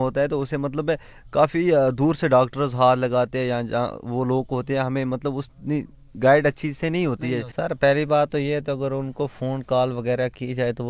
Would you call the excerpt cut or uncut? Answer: cut